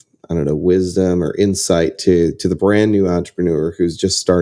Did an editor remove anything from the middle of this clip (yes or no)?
no